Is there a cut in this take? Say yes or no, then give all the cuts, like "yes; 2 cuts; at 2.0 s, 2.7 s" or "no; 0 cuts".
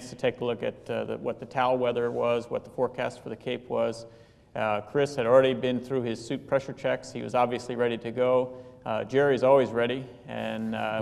no; 0 cuts